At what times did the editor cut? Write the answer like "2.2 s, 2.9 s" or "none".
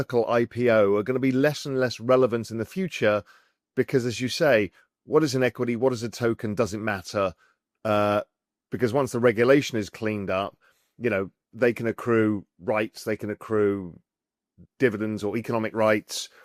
none